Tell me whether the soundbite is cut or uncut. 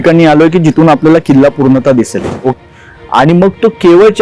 cut